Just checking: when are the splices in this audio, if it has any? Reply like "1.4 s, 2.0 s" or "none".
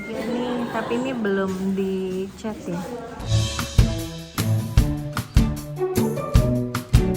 3.3 s